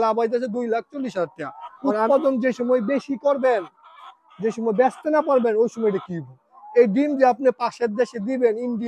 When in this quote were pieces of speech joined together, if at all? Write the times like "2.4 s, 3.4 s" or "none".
2.1 s